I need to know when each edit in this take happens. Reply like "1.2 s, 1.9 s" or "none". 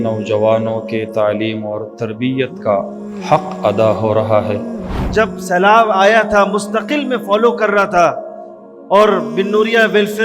4.7 s